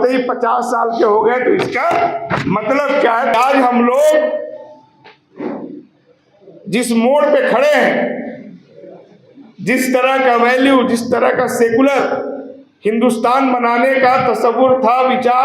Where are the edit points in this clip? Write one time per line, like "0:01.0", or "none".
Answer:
0:03.3